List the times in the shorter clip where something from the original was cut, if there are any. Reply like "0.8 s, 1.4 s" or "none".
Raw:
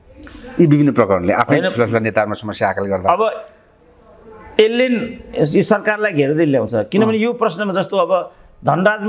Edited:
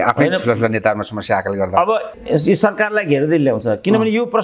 2.1 s